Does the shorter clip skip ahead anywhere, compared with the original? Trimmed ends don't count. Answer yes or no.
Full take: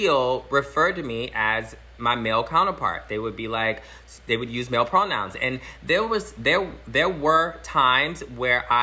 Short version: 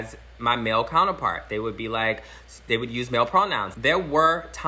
yes